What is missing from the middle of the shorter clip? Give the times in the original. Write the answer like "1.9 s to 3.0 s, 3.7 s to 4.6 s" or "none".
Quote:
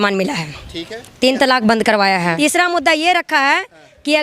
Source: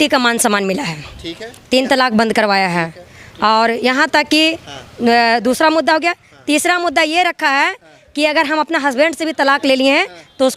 2.8 s to 6.5 s

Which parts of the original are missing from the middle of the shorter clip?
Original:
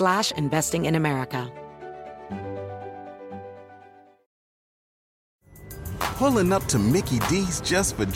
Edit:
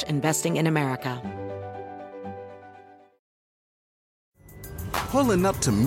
1.5 s to 2.2 s

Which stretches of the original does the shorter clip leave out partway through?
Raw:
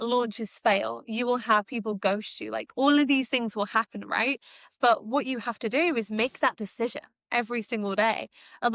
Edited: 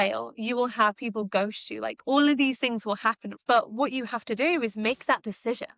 4.0 s to 4.6 s

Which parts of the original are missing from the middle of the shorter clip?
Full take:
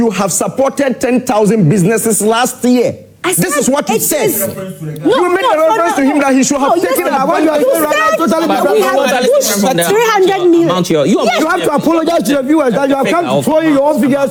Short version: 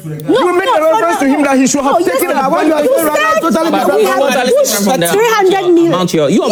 none

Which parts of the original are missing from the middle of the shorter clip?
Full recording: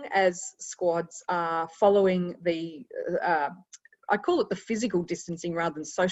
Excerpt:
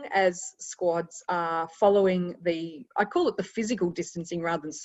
2.8 s to 3.9 s

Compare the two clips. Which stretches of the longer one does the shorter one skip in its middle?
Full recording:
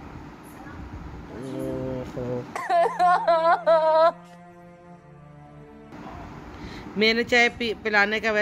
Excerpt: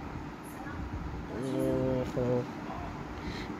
2.5 s to 5.9 s

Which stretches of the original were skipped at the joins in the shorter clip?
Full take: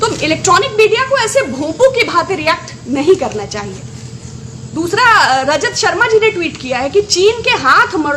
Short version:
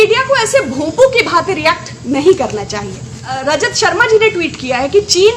4.2 s to 5.4 s

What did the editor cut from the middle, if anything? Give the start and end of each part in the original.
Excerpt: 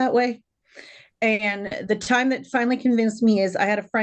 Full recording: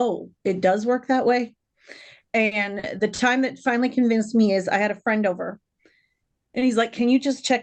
none

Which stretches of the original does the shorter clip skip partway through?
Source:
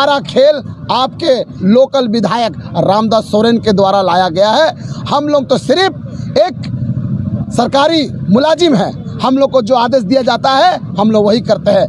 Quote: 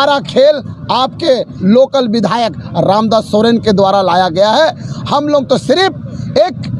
none

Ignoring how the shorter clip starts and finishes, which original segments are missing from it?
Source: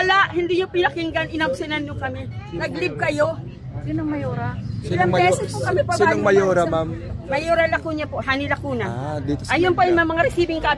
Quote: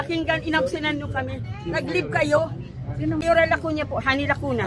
4.1 s to 7.4 s

